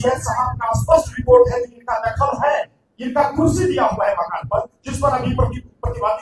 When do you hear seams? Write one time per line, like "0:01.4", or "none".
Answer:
none